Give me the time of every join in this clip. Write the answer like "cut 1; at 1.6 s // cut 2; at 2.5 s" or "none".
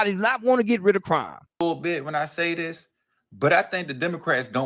cut 1; at 1.4 s